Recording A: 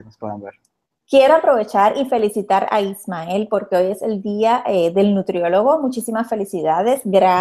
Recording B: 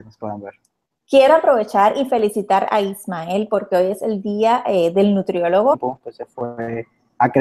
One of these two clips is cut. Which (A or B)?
A